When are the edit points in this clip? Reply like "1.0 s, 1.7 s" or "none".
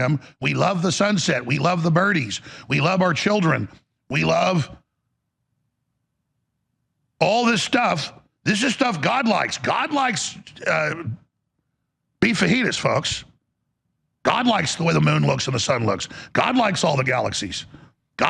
none

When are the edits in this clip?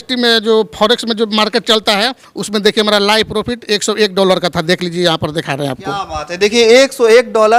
none

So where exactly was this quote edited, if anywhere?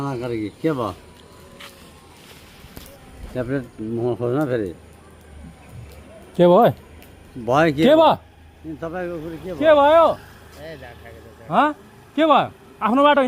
none

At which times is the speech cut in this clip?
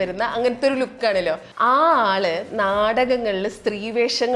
1.5 s

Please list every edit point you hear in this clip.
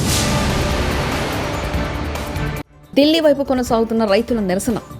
2.7 s

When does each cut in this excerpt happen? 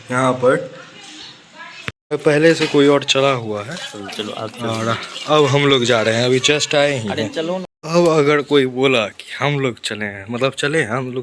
1.9 s

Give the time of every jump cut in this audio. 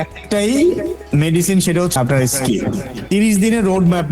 1.9 s, 2.9 s

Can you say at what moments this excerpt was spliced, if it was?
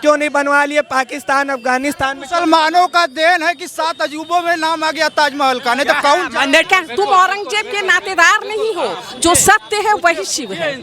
6.7 s

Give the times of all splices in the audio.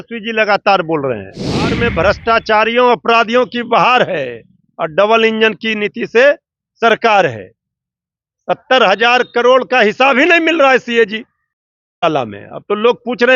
1.8 s

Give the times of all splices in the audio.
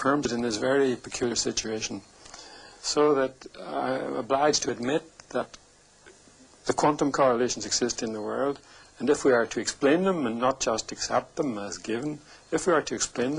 none

